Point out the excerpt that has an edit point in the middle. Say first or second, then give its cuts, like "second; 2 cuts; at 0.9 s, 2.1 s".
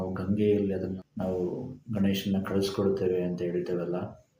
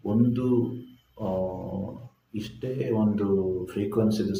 first; 1 cut; at 1.0 s